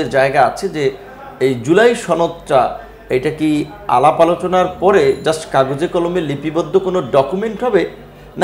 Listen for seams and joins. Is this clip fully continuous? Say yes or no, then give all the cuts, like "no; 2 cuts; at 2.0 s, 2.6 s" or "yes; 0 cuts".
yes; 0 cuts